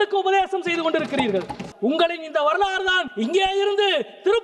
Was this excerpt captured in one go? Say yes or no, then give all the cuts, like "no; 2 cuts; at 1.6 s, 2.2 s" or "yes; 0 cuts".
no; 2 cuts; at 1.6 s, 3.1 s